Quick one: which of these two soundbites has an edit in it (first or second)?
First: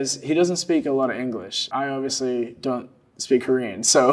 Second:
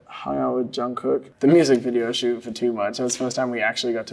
second